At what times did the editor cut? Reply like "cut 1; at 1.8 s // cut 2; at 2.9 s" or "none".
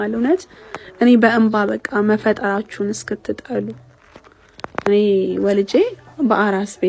none